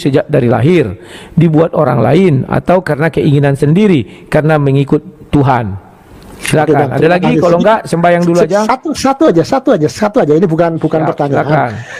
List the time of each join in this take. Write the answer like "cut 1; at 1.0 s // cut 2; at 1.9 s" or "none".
none